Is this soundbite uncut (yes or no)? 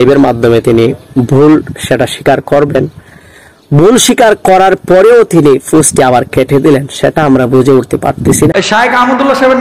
no